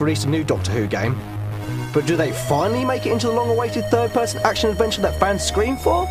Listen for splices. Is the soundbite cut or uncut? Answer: uncut